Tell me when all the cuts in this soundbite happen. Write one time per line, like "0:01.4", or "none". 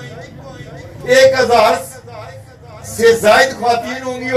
none